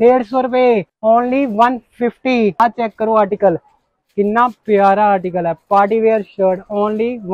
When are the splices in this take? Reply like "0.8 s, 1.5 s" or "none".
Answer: 0.9 s, 2.6 s